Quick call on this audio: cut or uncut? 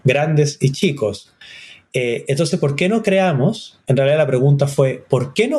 uncut